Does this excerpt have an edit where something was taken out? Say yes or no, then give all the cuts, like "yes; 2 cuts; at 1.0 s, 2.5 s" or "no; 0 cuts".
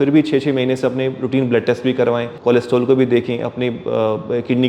yes; 1 cut; at 2.3 s